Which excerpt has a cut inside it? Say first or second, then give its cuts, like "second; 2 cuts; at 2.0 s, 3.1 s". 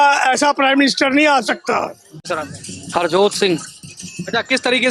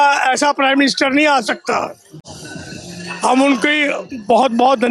first; 1 cut; at 2.3 s